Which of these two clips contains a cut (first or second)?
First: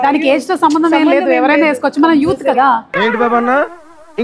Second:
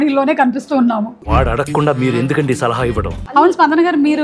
second